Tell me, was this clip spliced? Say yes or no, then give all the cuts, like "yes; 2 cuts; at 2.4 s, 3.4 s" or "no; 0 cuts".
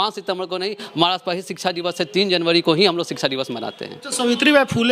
no; 0 cuts